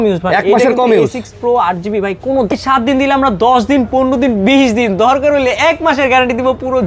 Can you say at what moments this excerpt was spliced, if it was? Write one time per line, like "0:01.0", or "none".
0:02.5